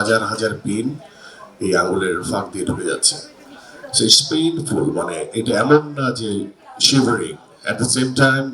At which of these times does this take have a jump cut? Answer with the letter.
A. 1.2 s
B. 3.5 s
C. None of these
C